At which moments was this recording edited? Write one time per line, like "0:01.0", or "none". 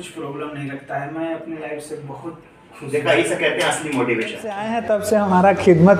0:04.7